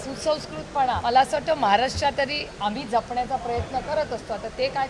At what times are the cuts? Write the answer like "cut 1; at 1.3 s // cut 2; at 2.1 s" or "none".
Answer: cut 1; at 1.0 s